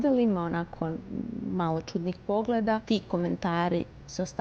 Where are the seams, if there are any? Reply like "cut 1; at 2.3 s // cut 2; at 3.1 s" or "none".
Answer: cut 1; at 2.8 s

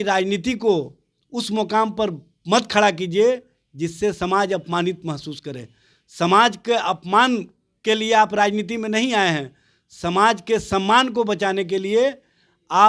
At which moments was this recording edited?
none

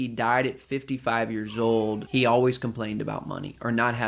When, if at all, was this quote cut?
cut 1; at 2.0 s

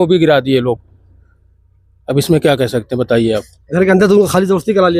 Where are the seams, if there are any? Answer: none

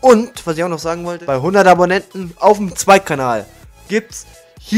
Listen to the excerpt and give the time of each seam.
cut 1; at 1.1 s

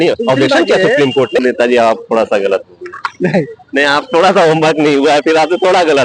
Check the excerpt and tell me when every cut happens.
cut 1; at 1.4 s

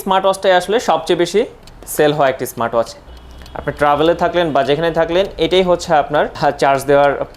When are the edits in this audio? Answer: cut 1; at 3.1 s // cut 2; at 6.3 s

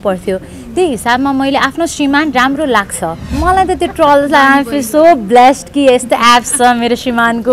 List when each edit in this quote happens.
cut 1; at 3.2 s

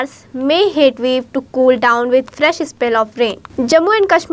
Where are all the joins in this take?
cut 1; at 3.4 s

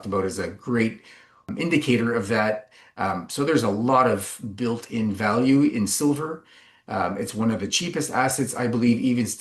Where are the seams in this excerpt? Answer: cut 1; at 1.5 s

